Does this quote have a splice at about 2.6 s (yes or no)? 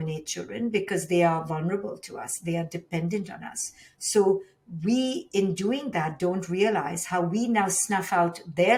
no